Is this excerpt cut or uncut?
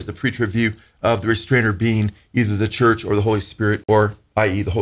cut